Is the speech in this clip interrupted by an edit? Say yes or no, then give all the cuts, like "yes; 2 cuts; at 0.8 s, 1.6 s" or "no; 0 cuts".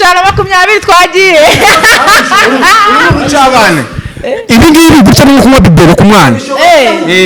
no; 0 cuts